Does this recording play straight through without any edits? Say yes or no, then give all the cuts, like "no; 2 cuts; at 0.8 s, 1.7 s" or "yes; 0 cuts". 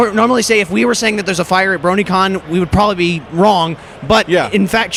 yes; 0 cuts